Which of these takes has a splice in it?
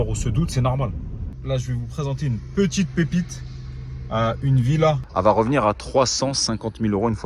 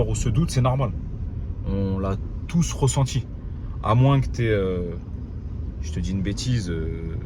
first; 2 cuts; at 1.4 s, 5.1 s

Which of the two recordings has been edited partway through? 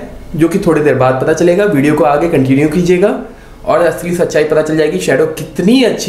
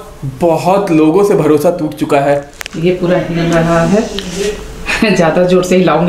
second; 1 cut; at 2.5 s

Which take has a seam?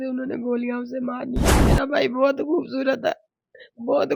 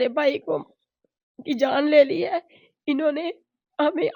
first; 1 cut; at 1.7 s

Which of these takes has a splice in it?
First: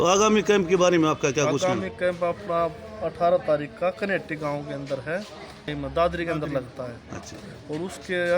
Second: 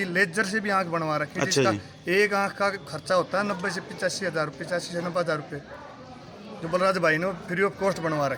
first; 1 cut; at 5.7 s

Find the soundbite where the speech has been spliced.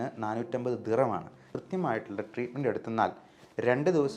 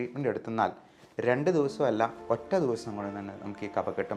first; 1 cut; at 1.4 s

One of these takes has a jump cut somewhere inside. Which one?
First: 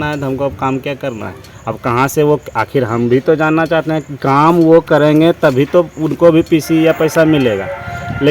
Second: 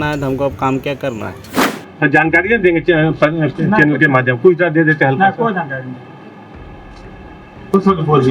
second; 1 cut; at 1.5 s

